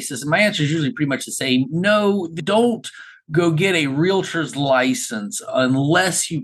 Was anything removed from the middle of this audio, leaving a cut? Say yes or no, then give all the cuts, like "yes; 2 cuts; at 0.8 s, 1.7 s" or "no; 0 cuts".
no; 0 cuts